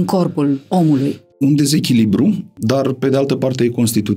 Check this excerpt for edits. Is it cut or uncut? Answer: cut